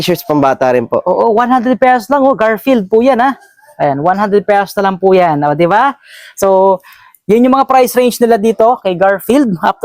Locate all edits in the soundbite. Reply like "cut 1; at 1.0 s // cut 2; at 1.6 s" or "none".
none